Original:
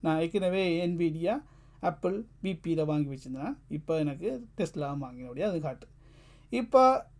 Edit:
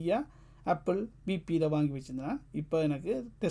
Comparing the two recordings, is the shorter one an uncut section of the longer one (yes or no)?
yes